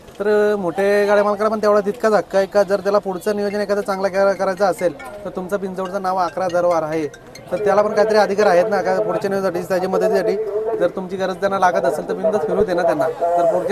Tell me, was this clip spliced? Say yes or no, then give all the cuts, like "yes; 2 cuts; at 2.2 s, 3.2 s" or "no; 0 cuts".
no; 0 cuts